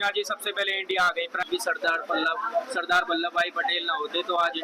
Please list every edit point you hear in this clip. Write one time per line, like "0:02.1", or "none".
0:01.5